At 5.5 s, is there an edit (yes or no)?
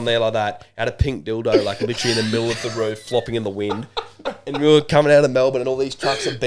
no